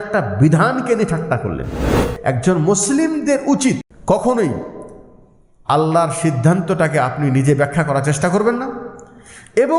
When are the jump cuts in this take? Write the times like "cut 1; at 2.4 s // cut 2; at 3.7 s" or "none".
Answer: cut 1; at 2.0 s // cut 2; at 3.9 s